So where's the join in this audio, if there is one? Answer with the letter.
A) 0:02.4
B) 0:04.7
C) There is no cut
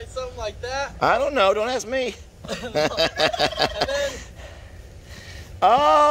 C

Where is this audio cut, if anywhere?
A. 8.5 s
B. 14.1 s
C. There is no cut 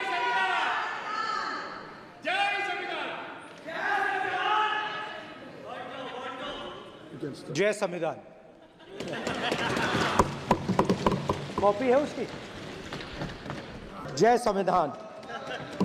B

